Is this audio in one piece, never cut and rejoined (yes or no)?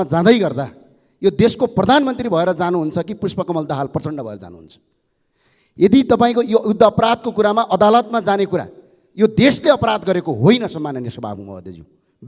yes